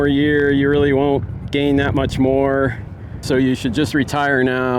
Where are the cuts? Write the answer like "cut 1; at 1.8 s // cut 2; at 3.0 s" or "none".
cut 1; at 3.2 s